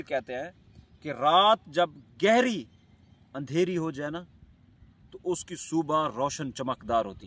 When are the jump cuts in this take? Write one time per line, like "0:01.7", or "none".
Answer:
none